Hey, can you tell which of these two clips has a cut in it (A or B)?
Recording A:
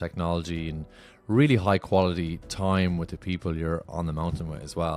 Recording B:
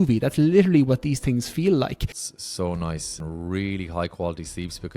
B